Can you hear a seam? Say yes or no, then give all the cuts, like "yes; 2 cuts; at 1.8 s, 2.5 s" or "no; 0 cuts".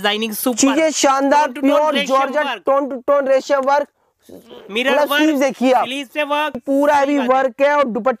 yes; 1 cut; at 6.6 s